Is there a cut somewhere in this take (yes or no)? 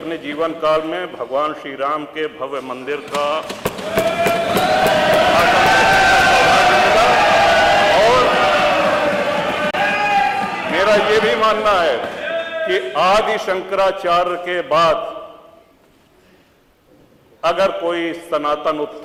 no